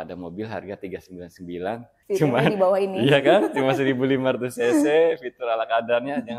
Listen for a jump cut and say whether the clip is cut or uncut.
cut